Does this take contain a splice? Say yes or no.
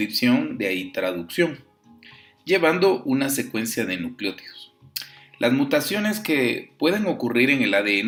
no